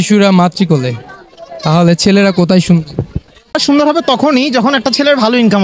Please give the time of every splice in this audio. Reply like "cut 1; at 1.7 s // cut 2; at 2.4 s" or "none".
cut 1; at 3.6 s